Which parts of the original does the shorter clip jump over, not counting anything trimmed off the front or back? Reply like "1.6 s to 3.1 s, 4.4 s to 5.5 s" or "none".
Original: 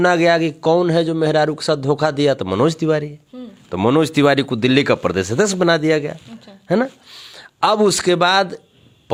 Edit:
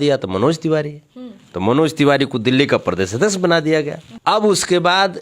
6.2 s to 7.4 s

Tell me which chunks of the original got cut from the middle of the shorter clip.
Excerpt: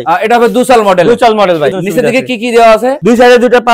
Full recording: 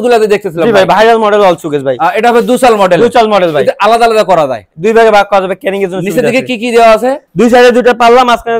3.6 s to 5.9 s, 7.2 s to 7.3 s

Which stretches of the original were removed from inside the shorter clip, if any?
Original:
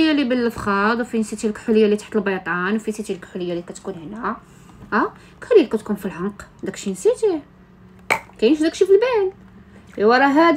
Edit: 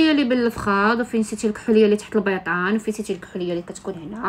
none

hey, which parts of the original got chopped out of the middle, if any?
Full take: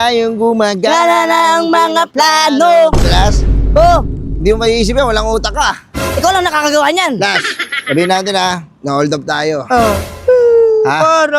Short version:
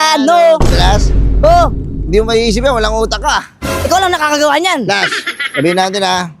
none

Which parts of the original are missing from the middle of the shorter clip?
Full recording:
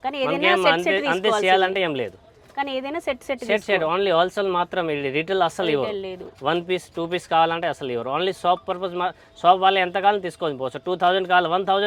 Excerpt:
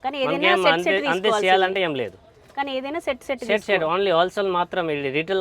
none

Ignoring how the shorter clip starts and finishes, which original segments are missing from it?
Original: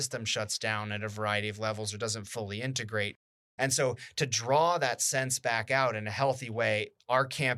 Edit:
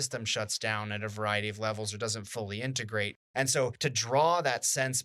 3.6 s to 3.9 s

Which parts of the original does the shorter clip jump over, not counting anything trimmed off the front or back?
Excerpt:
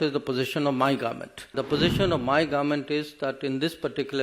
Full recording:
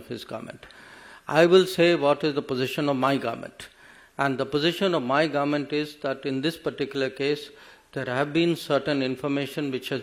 3.8 s to 4.4 s

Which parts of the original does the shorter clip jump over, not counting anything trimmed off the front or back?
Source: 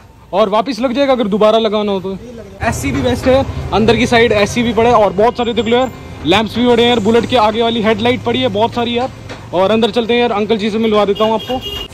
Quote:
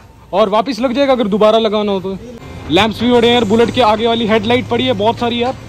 2.5 s to 6.0 s

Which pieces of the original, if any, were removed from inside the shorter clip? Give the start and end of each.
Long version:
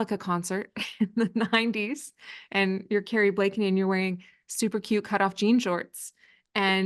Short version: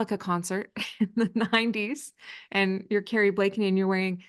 none

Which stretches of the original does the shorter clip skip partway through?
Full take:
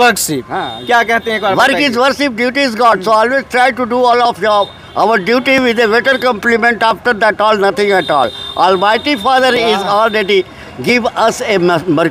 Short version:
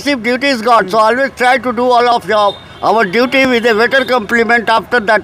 none

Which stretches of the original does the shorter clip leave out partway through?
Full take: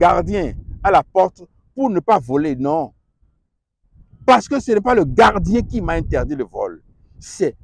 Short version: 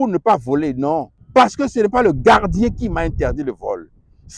3.0 s to 4.1 s

